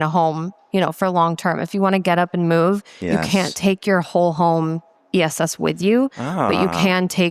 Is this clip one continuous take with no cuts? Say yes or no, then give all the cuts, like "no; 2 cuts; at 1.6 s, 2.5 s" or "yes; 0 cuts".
yes; 0 cuts